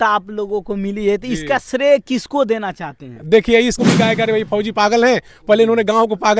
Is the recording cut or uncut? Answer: cut